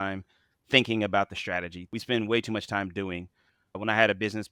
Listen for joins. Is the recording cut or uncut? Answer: cut